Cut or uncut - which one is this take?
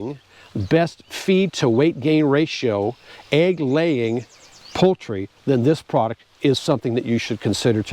uncut